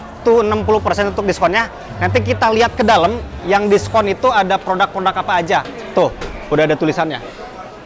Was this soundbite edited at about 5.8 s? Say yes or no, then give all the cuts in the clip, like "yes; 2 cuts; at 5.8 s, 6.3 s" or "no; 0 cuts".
yes; 1 cut; at 5.8 s